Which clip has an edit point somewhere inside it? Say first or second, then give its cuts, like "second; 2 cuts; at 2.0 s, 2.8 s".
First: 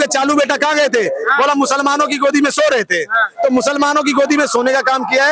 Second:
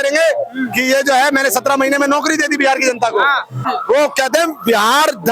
second; 1 cut; at 3.6 s